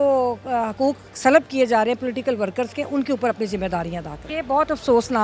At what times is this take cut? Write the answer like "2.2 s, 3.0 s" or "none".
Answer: 4.3 s